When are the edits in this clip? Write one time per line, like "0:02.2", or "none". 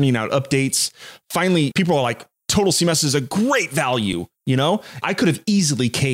0:01.7
0:05.0

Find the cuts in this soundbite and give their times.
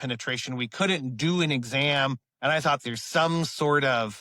0:02.8

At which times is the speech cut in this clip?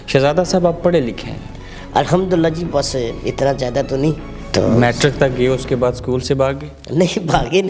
0:04.3

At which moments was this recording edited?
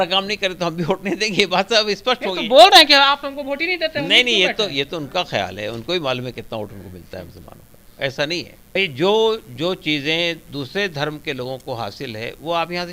0:08.8

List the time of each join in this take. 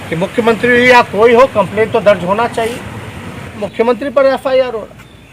0:03.7

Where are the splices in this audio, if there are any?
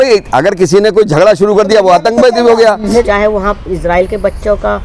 0:03.0

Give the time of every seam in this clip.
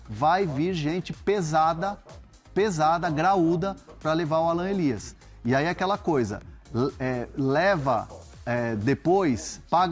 none

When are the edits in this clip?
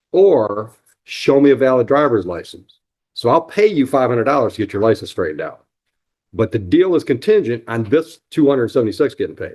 none

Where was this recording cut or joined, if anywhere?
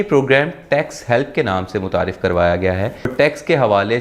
0:03.1

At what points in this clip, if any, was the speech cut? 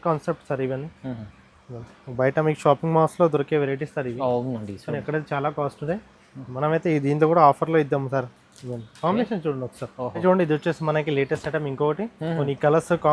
0:10.2

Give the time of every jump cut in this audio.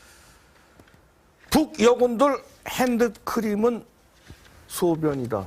none

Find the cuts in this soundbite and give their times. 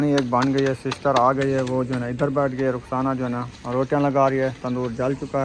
none

